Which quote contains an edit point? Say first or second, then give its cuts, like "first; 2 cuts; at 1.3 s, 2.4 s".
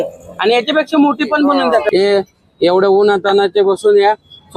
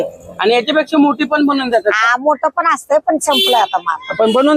first; 1 cut; at 1.9 s